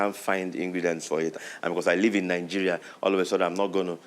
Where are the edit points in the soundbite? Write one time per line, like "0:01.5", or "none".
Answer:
0:01.3